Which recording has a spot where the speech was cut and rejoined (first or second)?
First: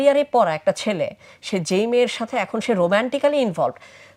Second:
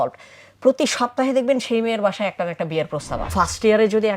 second